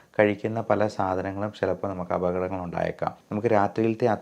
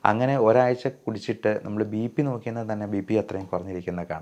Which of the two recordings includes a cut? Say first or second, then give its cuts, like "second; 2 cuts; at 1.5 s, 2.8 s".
first; 1 cut; at 3.2 s